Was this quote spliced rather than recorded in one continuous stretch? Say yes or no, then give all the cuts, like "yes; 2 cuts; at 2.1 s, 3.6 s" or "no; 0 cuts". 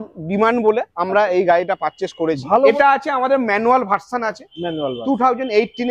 yes; 1 cut; at 2.7 s